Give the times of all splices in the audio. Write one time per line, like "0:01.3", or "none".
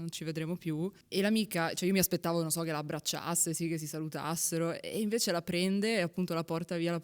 0:01.0